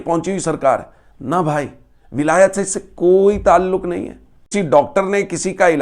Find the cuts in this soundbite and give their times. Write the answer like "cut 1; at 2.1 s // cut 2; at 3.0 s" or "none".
cut 1; at 4.5 s